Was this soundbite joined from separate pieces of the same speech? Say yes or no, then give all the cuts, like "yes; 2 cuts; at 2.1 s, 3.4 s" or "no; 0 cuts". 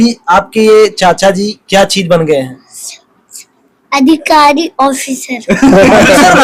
no; 0 cuts